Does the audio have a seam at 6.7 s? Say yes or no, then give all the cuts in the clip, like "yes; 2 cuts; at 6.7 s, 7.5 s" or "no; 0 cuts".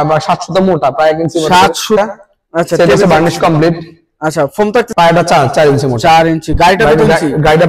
no; 2 cuts; at 2.0 s, 4.9 s